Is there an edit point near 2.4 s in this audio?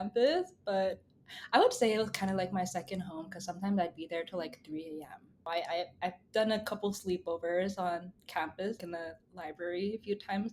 no; 2 cuts; at 5.4 s, 8.8 s

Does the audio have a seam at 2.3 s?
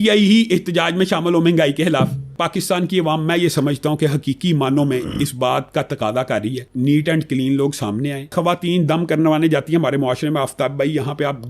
yes; 3 cuts; at 2.3 s, 6.6 s, 8.3 s

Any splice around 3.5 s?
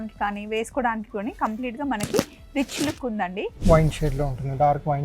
yes; 1 cut; at 3.5 s

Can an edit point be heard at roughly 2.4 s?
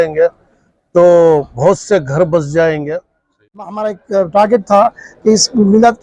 no; 1 cut; at 3.8 s

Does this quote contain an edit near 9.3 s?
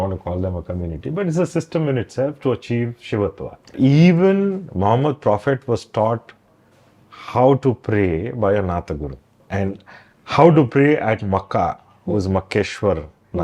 yes; 2 cuts; at 3.7 s, 9.3 s

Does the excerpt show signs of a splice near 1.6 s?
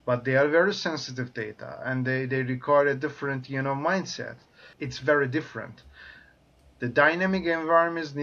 no; 1 cut; at 4.7 s

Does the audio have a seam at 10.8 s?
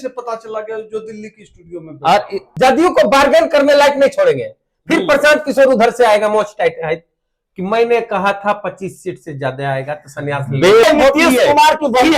yes; 2 cuts; at 2.4 s, 10.8 s

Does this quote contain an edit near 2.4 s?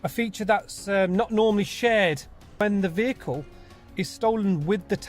yes; 1 cut; at 2.4 s

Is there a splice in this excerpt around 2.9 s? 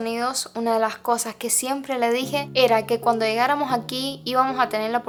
no; 0 cuts

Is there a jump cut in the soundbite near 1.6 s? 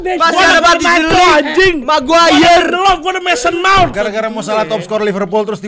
no; 1 cut; at 3.9 s

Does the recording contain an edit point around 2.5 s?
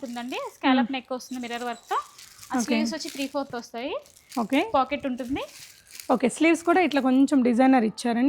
no; 0 cuts

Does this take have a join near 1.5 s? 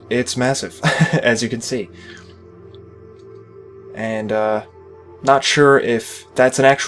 yes; 1 cut; at 1.5 s

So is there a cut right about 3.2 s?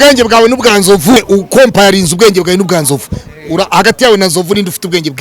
no; 1 cut; at 1.2 s

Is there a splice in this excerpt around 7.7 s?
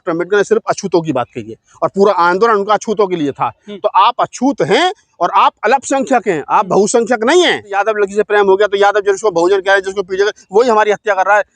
yes; 1 cut; at 7.7 s

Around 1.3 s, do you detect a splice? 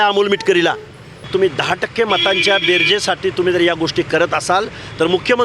yes; 1 cut; at 1.3 s

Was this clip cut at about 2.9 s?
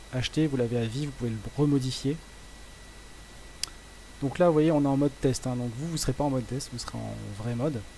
no; 0 cuts

